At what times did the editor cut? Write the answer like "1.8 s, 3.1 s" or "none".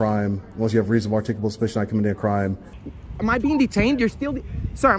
2.9 s